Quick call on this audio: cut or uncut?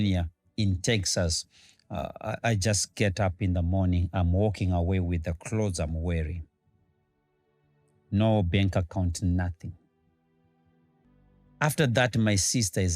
cut